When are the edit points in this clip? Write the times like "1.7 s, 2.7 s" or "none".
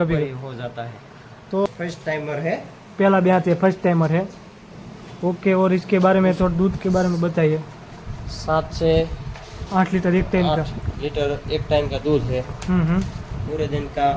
1.7 s